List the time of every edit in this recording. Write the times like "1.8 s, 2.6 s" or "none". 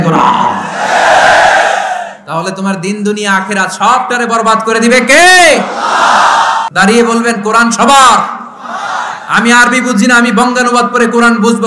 6.7 s

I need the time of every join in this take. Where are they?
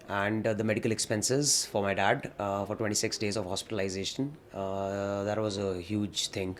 none

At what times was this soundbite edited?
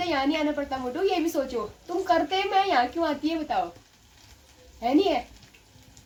none

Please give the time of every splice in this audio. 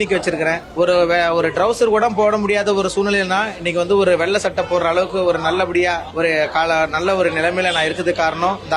6.1 s

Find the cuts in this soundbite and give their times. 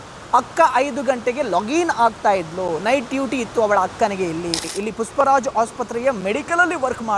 4.6 s

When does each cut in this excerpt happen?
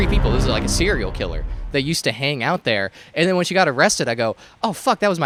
none

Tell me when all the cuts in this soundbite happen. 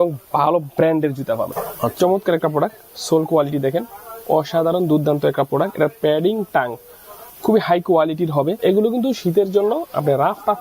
1.6 s, 8.6 s

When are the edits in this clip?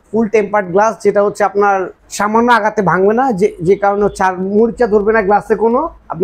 none

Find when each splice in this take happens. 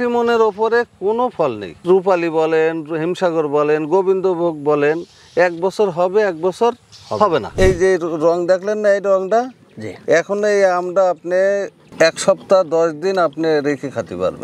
1.8 s, 7.5 s

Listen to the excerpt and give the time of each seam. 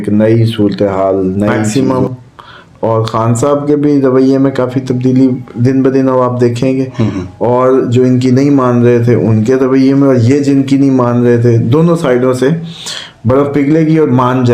1.7 s

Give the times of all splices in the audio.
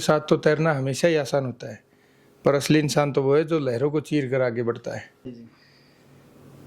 5.4 s

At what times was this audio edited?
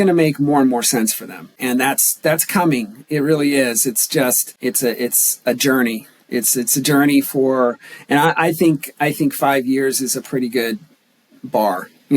1.6 s, 4.5 s

